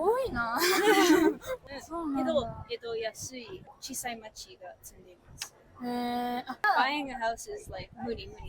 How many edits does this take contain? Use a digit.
3